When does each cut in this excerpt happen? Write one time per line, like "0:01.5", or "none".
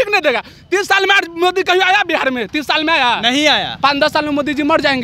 none

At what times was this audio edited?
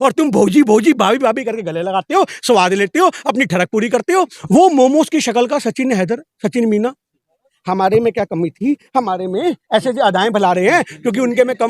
0:04.4
0:07.5

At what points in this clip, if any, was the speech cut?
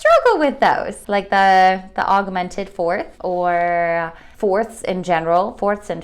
0:00.9
0:03.1
0:04.2

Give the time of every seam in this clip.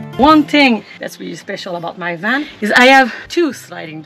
0:01.0
0:02.5
0:03.2

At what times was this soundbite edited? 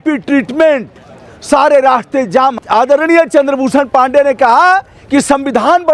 0:02.6

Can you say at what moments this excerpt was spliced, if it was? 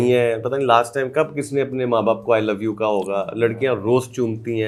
none

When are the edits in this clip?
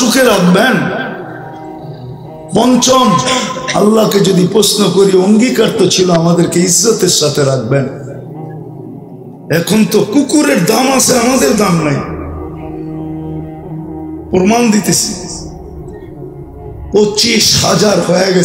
0:08.0
0:09.5
0:12.0
0:14.3

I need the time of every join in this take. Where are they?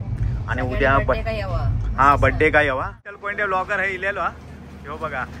0:03.3

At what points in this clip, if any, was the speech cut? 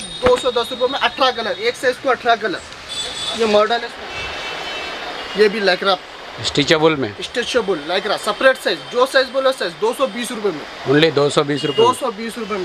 0:03.9

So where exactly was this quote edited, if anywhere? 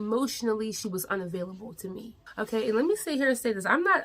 0:02.2

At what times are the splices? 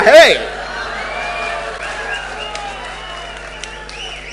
none

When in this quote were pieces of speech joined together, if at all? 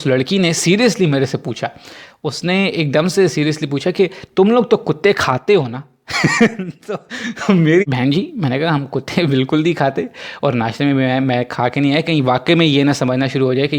0:07.8

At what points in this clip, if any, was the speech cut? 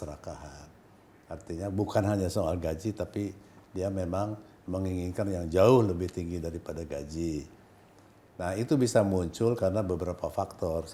none

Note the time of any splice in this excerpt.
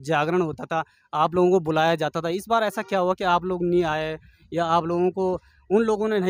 none

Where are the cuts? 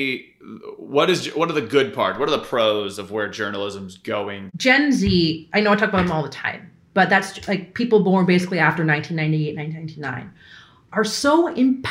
0:04.5

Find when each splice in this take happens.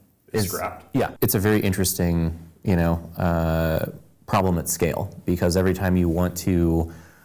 0:01.1

